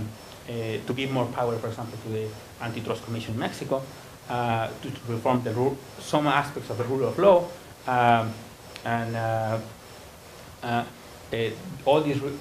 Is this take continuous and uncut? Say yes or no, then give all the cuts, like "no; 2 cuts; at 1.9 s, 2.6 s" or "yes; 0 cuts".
no; 1 cut; at 9.3 s